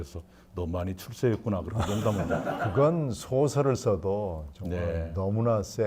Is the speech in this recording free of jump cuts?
no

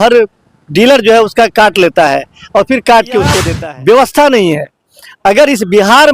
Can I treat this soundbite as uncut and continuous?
no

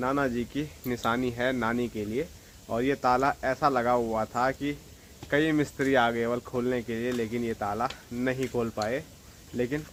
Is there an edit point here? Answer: no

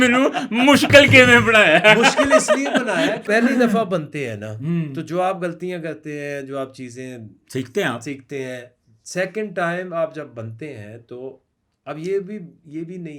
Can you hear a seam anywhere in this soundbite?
yes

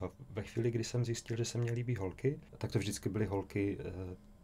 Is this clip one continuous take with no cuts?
no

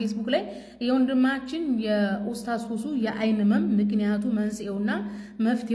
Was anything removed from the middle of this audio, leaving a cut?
no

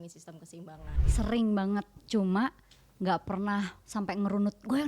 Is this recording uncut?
no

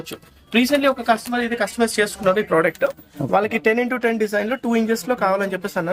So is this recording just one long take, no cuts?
yes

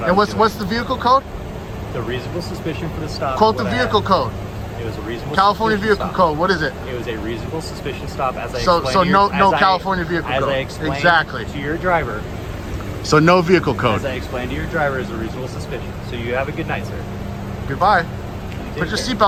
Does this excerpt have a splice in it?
no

